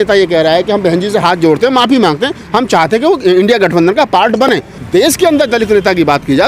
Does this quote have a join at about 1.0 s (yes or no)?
no